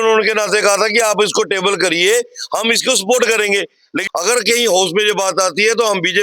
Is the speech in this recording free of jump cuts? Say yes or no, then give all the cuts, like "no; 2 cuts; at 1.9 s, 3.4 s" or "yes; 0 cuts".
no; 1 cut; at 3.9 s